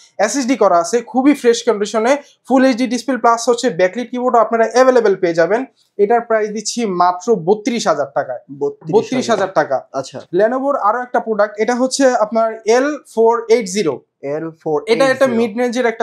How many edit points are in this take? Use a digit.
0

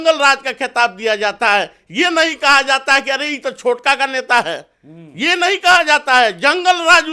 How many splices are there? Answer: 0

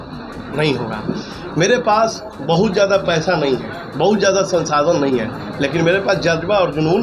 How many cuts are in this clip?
0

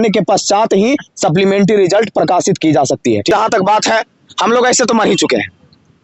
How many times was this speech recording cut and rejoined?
1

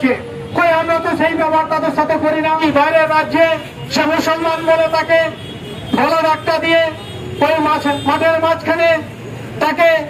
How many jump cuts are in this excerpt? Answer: 1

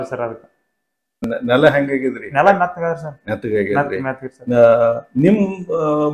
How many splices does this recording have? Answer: 1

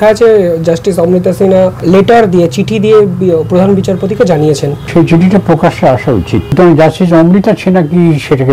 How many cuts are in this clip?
3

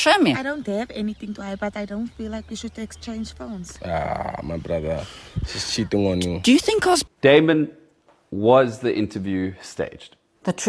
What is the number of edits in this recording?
1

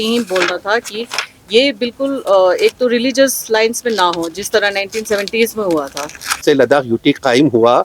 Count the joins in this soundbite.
1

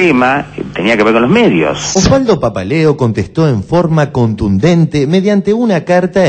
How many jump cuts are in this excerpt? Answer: 0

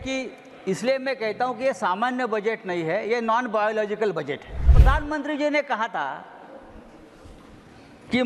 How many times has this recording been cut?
1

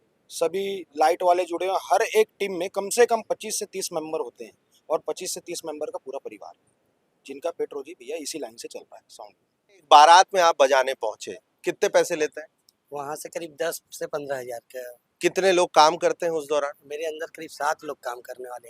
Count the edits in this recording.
1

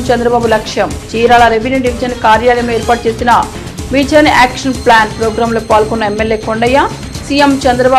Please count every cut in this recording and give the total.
0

